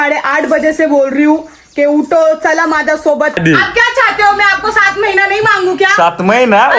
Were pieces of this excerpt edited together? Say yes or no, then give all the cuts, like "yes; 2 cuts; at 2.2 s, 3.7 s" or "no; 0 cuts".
yes; 1 cut; at 3.4 s